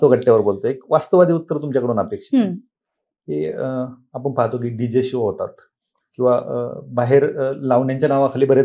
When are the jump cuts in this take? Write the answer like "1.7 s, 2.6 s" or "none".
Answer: none